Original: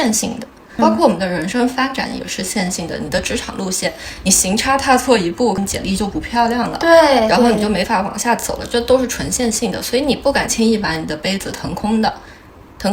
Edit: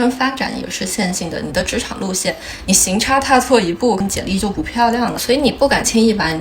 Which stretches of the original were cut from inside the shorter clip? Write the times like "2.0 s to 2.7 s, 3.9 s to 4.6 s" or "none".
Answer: 6.7 s to 9.8 s